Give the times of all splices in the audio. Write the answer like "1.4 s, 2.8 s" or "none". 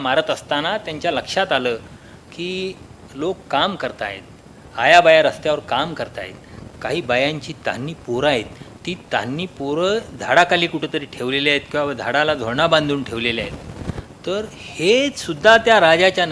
none